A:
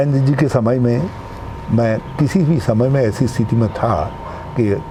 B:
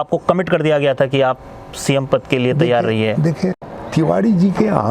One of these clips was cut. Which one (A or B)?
B